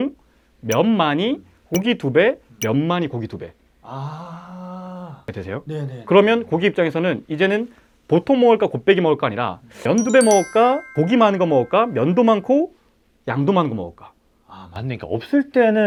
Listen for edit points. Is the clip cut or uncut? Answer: uncut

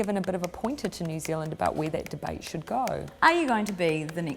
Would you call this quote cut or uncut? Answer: cut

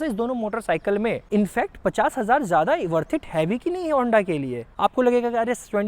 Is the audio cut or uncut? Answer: cut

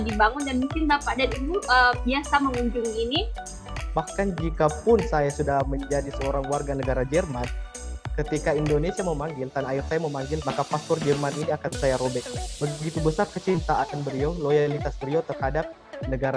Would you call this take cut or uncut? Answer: cut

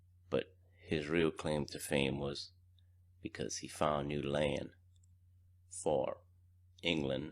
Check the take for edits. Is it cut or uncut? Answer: cut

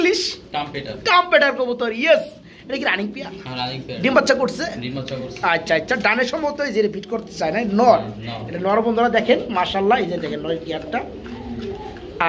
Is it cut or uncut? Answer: uncut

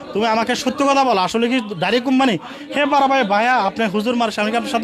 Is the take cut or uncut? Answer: uncut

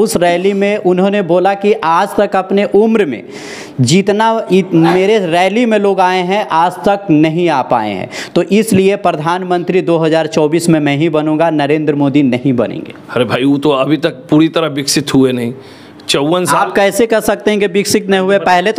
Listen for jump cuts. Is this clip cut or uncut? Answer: uncut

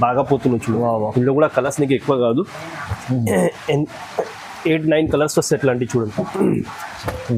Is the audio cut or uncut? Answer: uncut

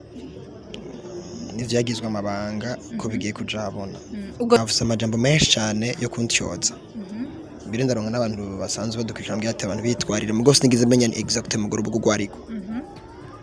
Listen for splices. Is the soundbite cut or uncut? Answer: uncut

